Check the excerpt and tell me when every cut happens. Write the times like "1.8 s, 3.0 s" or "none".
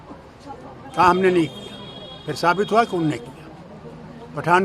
none